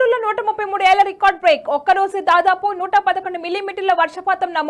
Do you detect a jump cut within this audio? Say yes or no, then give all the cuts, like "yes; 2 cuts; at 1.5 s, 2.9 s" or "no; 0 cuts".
no; 0 cuts